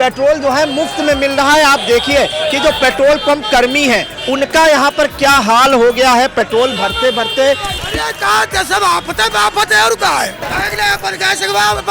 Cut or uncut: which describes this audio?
cut